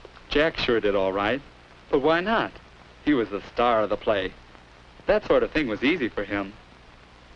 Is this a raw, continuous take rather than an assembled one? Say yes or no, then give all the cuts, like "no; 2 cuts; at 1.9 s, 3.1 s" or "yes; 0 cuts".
yes; 0 cuts